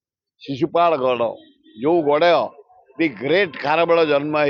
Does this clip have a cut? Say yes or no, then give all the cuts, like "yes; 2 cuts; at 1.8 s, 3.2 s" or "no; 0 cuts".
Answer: no; 0 cuts